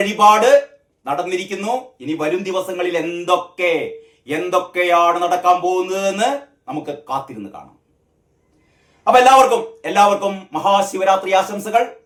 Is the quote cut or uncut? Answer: uncut